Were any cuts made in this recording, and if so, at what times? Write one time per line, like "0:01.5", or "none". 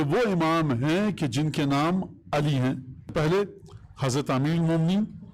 0:03.1